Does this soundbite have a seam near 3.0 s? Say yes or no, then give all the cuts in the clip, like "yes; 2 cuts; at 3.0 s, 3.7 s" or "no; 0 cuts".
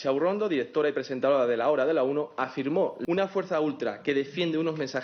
yes; 1 cut; at 3.0 s